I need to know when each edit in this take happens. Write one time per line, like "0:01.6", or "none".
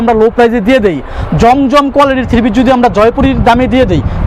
none

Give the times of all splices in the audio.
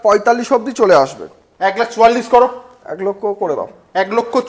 none

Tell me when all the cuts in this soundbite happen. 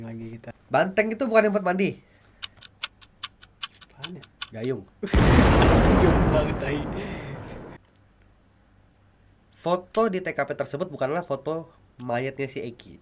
0:07.8

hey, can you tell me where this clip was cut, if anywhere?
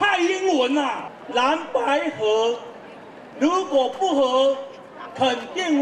0:01.0

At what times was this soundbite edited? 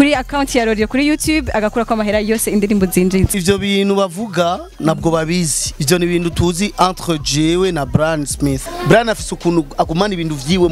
0:03.4
0:08.7

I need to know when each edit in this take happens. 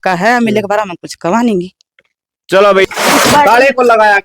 0:02.8

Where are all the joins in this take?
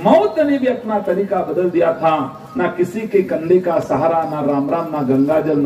none

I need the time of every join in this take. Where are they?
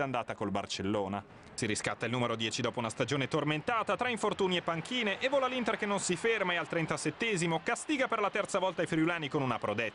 none

